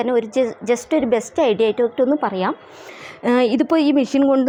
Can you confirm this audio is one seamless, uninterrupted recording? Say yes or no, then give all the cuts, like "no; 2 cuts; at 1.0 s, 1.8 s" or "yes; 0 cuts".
yes; 0 cuts